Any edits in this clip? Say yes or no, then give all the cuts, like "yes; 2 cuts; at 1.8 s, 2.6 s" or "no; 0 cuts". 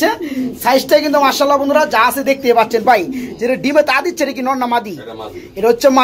no; 0 cuts